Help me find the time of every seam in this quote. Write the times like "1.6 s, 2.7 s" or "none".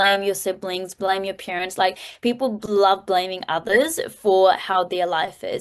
none